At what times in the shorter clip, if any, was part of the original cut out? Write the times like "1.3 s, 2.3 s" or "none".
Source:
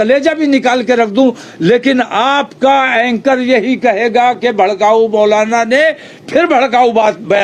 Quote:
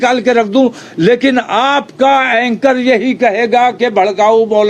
none